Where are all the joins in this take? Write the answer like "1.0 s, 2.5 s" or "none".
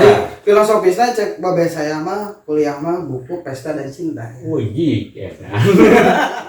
none